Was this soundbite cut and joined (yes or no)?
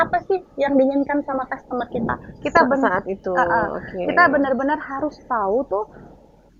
no